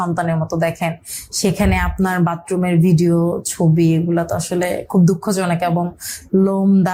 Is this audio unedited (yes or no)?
yes